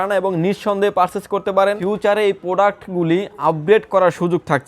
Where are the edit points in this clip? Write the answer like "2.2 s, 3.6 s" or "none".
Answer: 1.8 s